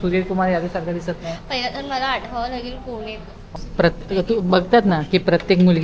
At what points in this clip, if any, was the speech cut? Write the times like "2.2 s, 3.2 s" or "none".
3.5 s

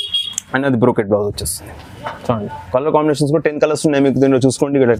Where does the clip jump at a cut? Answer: none

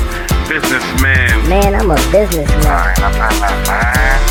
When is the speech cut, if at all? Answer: none

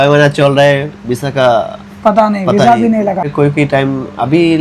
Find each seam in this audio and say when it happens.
3.3 s

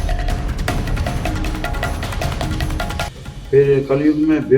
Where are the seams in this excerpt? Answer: 3.1 s

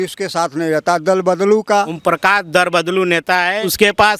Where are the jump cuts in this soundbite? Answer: 1.9 s

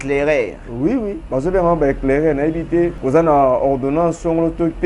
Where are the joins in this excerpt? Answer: 1.2 s, 3.0 s

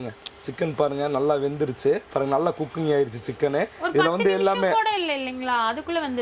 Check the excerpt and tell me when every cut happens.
none

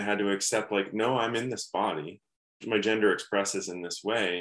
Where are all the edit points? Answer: 2.5 s

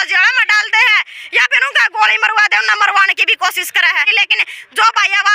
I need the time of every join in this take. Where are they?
4.1 s

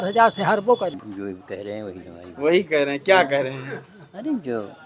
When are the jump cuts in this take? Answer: 1.1 s

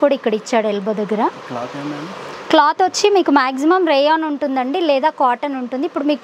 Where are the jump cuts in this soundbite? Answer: none

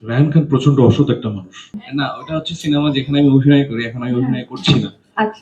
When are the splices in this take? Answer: 1.8 s

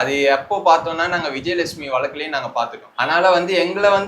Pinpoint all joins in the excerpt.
2.8 s

